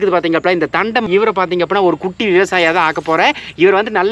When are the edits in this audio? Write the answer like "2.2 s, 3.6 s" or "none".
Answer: 1.1 s